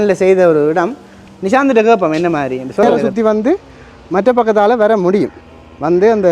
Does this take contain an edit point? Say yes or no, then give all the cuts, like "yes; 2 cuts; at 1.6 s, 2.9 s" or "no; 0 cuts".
yes; 1 cut; at 3.0 s